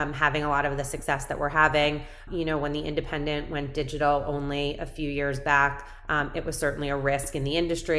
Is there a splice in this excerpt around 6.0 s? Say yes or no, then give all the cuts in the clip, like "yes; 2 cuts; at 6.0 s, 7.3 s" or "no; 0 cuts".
no; 1 cut; at 2.2 s